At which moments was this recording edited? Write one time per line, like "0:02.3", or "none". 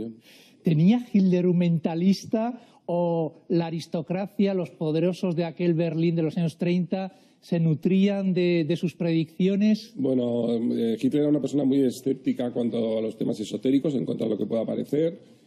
0:02.7